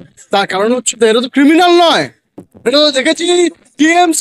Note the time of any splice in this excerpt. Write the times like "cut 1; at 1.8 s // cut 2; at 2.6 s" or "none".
none